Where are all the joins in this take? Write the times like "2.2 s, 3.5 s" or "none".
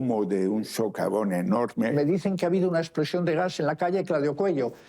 1.9 s

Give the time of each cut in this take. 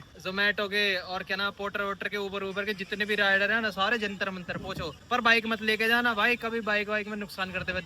none

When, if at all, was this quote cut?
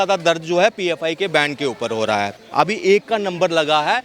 2.4 s

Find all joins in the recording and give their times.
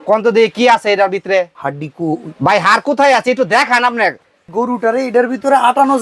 1.6 s, 4.4 s

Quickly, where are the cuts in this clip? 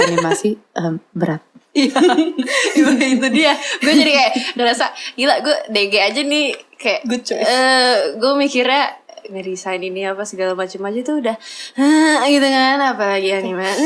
none

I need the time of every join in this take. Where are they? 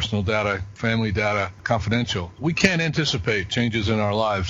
1.6 s, 2.4 s

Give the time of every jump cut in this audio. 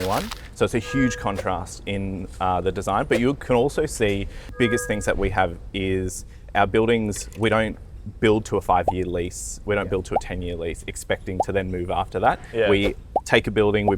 4.4 s

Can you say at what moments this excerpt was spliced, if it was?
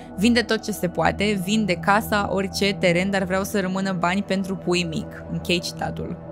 none

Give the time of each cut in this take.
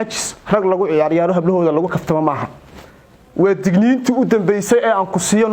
none

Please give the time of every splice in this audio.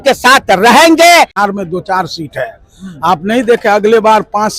1.4 s

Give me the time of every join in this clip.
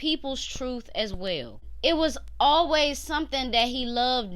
1.6 s

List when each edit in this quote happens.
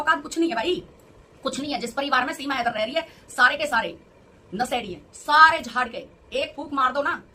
none

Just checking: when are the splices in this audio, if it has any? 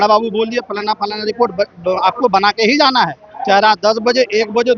none

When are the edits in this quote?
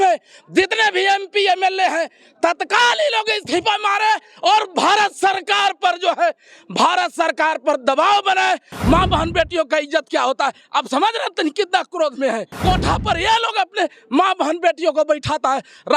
8.7 s, 12.5 s

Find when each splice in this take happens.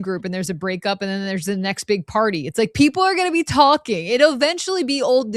none

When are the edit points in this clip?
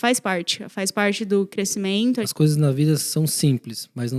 2.3 s

